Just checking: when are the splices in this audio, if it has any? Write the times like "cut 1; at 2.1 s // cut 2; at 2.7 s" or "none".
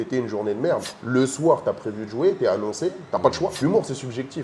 cut 1; at 0.9 s // cut 2; at 3.6 s